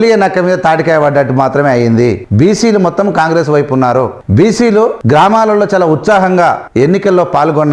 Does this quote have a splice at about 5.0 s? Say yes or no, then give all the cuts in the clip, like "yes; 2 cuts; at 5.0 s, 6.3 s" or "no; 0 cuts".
yes; 4 cuts; at 2.2 s, 4.2 s, 5.0 s, 6.6 s